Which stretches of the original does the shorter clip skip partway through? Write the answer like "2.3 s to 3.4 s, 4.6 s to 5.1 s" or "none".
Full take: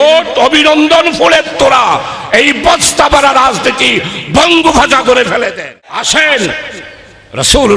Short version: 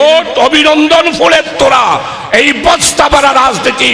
none